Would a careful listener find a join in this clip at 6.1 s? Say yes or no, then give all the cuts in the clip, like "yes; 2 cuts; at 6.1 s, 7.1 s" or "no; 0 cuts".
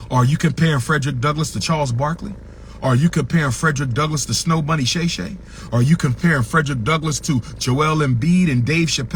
no; 0 cuts